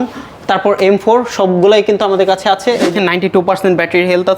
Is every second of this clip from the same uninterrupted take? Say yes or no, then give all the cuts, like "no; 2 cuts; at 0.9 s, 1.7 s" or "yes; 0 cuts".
no; 1 cut; at 2.9 s